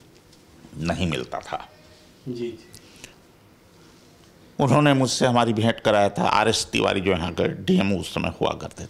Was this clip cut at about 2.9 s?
no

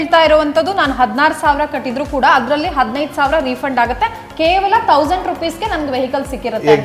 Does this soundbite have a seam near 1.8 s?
no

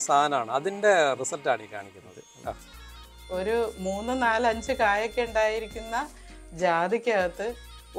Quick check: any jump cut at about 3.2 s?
yes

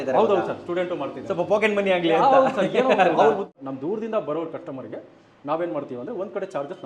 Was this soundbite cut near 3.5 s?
yes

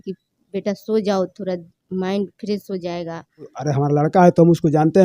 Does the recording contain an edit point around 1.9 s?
no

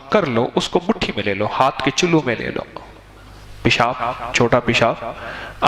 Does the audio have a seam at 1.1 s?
no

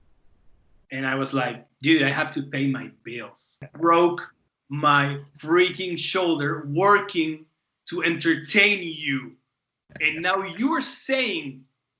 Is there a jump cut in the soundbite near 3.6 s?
yes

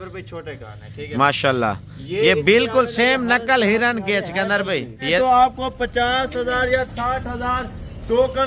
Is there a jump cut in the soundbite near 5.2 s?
yes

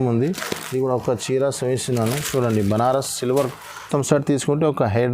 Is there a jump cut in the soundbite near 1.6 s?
no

